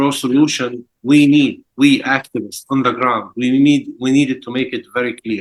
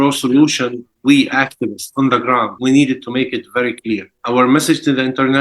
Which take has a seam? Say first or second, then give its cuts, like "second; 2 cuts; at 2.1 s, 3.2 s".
second; 3 cuts; at 0.9 s, 2.5 s, 4.2 s